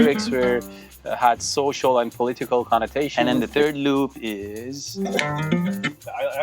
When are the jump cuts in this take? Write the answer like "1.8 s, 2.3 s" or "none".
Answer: 3.1 s, 5.0 s